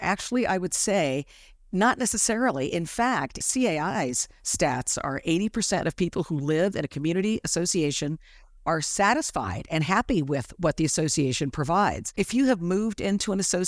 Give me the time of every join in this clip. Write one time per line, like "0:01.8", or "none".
0:03.4
0:12.1